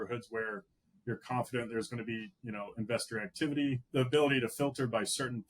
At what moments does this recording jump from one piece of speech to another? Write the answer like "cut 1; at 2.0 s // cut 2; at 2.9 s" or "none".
cut 1; at 3.8 s